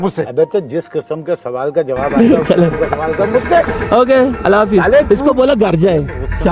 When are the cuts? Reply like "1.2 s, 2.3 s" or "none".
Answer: none